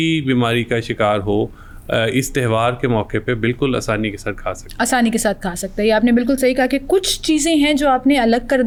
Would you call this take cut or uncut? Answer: uncut